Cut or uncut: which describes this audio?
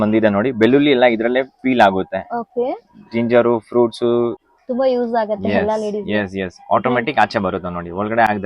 cut